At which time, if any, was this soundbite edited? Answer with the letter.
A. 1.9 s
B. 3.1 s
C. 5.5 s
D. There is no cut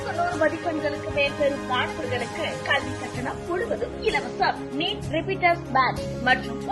D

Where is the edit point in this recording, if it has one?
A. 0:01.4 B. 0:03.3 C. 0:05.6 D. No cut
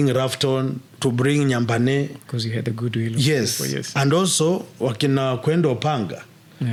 D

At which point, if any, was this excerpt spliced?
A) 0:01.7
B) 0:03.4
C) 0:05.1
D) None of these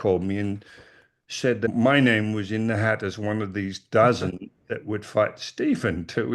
A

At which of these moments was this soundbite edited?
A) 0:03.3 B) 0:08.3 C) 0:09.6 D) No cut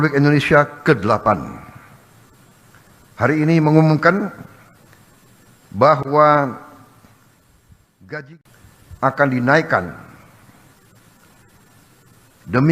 B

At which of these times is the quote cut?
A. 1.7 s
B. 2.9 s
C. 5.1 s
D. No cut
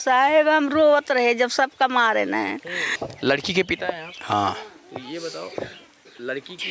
D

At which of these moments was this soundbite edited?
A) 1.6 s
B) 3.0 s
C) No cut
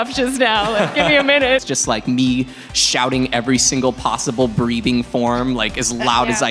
A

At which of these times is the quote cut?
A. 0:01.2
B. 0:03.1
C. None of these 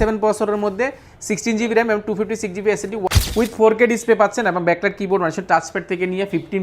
B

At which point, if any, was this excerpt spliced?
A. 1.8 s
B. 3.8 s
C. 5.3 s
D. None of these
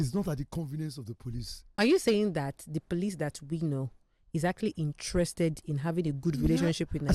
A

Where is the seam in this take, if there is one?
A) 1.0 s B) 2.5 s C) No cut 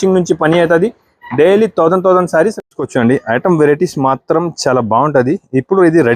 B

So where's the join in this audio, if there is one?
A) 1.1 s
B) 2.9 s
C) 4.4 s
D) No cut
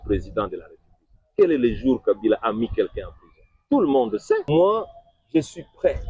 C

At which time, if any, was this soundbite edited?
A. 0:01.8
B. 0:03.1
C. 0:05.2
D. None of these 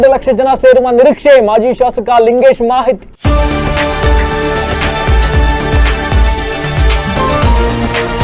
B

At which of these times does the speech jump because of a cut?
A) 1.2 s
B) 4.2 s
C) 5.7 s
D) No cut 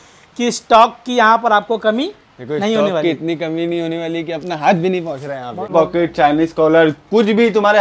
C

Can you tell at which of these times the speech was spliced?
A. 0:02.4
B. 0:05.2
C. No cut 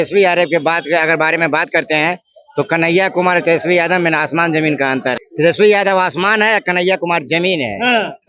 B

